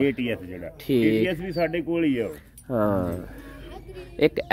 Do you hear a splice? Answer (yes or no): no